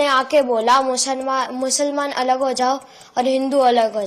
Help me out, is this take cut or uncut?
uncut